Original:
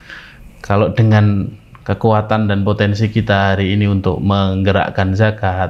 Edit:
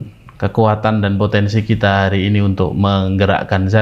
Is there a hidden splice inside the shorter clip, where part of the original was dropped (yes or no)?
no